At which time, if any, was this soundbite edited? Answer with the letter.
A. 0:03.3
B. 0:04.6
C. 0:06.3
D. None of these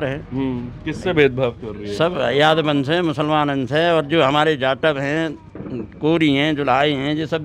D